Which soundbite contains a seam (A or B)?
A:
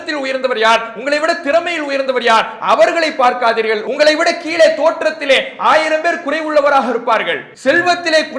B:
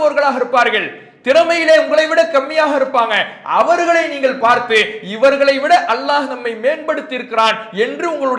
A